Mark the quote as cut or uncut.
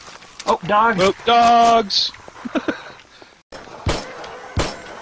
cut